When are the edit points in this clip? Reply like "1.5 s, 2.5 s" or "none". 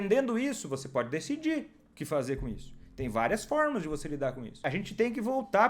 4.6 s

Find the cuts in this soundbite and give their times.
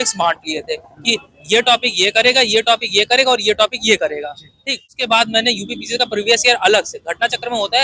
5.0 s

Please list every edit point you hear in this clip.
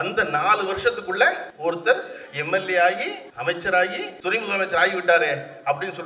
1.5 s, 3.2 s, 4.1 s

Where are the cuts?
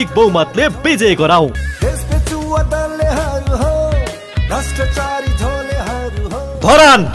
none

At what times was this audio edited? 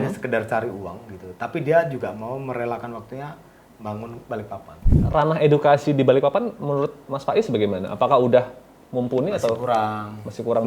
4.9 s

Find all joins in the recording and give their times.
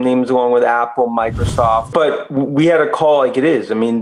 1.9 s

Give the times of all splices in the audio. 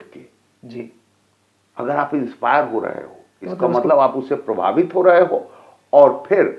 none

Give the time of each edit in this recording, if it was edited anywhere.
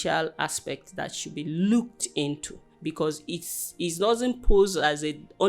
none

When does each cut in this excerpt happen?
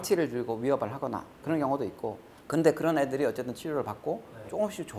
none

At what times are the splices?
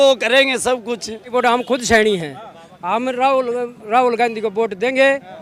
1.3 s

